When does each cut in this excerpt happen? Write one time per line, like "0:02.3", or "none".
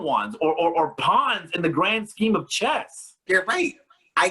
0:03.2